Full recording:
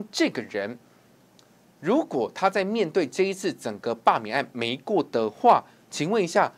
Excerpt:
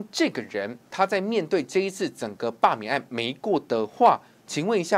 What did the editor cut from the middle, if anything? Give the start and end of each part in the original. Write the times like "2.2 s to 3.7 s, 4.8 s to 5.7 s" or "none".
0.9 s to 2.3 s